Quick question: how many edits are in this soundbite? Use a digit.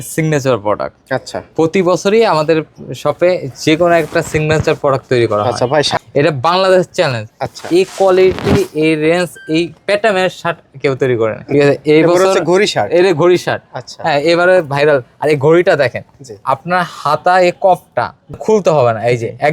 3